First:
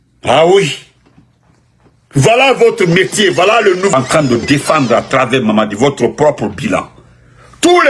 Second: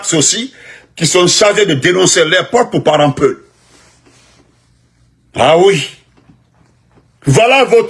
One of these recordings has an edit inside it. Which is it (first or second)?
first